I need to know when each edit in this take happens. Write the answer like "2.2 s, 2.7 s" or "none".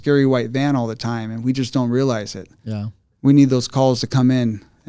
none